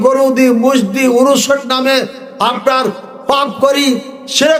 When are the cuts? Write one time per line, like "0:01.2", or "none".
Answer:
none